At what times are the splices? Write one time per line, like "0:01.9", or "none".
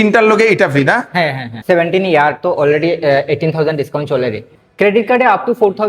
0:01.5
0:04.5